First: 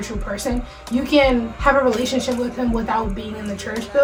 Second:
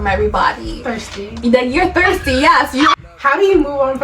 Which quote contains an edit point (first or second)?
second